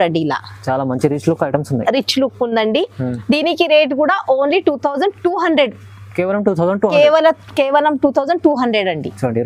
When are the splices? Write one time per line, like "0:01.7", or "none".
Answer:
none